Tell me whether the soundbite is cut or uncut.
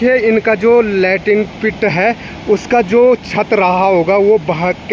uncut